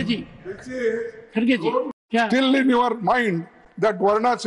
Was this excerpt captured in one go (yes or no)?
no